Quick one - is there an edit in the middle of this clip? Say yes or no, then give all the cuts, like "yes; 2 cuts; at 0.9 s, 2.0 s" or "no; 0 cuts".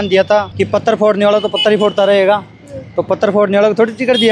no; 0 cuts